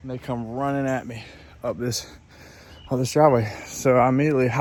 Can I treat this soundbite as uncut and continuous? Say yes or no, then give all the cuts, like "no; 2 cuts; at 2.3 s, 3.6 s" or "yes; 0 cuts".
yes; 0 cuts